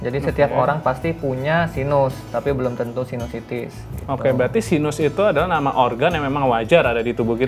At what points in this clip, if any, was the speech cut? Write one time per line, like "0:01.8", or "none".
none